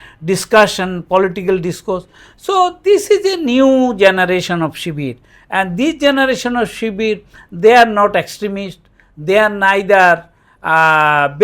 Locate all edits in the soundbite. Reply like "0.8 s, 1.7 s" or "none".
none